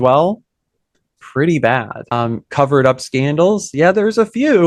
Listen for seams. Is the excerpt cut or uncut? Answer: uncut